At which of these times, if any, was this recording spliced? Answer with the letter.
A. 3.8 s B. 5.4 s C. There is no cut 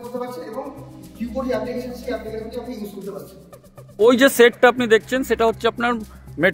A